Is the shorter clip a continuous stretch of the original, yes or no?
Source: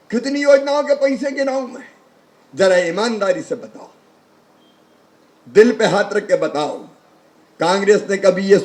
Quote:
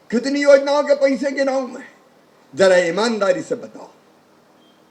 yes